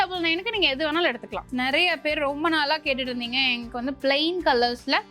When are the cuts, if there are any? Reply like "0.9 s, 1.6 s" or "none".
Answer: 1.4 s

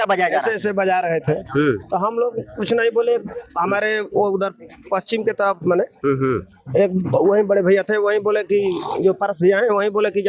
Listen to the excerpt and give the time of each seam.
none

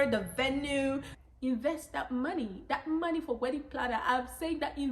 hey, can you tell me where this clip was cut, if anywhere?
1.3 s

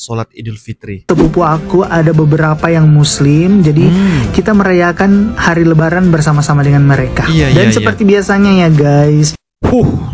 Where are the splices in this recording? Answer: 1.1 s

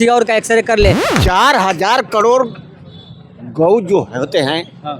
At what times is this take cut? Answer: 1.1 s

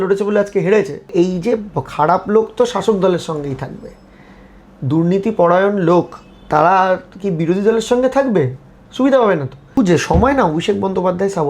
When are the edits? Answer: 1.0 s, 9.4 s

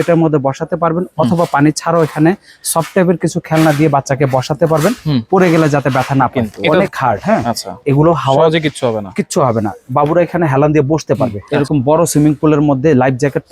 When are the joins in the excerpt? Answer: 6.3 s, 11.4 s

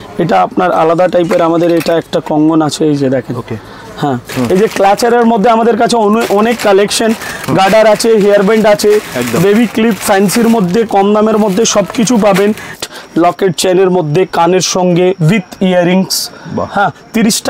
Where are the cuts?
4.3 s, 12.7 s

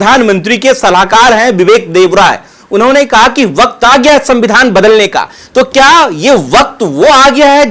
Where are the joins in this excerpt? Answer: none

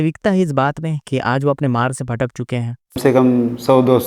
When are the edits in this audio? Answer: 3.0 s

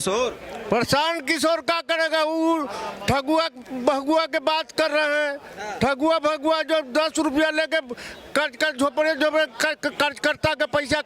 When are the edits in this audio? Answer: none

